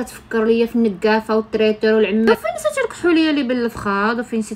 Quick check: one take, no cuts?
no; 1 cut; at 2.3 s

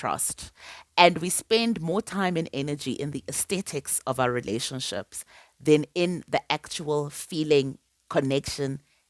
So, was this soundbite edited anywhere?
no; 0 cuts

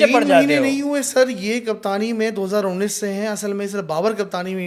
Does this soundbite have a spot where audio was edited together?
no; 0 cuts

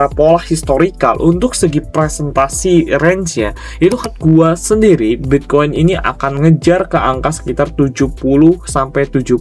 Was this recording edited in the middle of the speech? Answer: yes; 1 cut; at 4.1 s

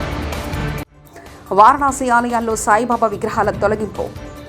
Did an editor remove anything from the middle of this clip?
no; 0 cuts

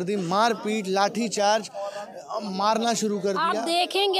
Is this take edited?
no; 0 cuts

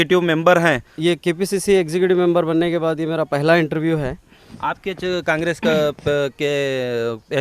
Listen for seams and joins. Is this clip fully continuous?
no; 2 cuts; at 0.9 s, 4.4 s

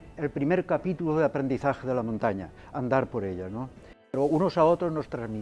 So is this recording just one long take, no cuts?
no; 1 cut; at 4.1 s

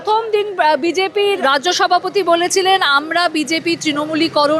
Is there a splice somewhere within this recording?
yes; 1 cut; at 1.4 s

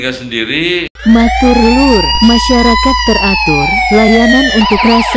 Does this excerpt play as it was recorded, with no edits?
no; 1 cut; at 0.9 s

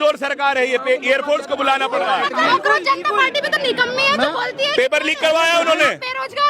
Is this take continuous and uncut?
no; 1 cut; at 2.5 s

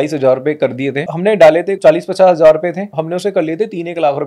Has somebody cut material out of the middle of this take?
yes; 3 cuts; at 1.0 s, 1.8 s, 2.9 s

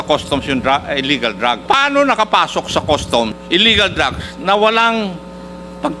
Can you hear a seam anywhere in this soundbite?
yes; 2 cuts; at 1.6 s, 3.4 s

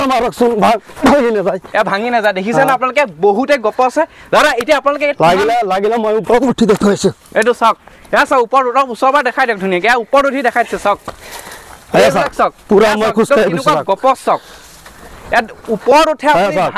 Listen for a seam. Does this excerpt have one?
no; 0 cuts

